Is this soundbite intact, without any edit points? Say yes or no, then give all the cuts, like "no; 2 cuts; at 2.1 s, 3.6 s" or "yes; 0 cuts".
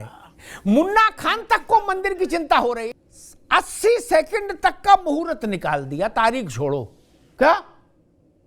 no; 1 cut; at 3.0 s